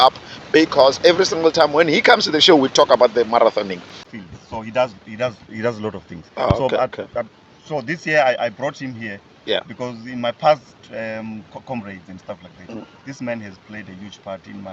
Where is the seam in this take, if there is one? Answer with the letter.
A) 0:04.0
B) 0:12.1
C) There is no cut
A